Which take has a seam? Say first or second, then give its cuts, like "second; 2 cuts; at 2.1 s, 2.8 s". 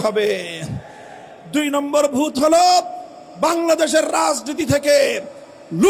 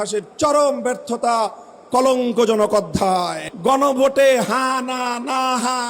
second; 1 cut; at 3.4 s